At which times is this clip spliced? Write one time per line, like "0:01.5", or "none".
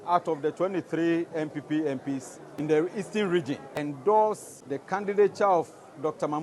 0:02.4
0:03.7
0:05.0